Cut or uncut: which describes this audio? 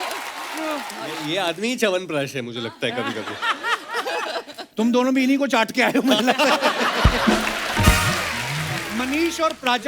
cut